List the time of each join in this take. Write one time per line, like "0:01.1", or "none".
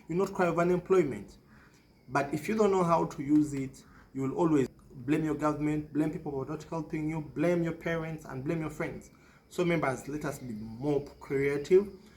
0:04.7